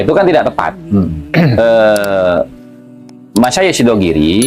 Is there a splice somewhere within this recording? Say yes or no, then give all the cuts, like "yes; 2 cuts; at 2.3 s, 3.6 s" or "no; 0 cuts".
yes; 1 cut; at 1.3 s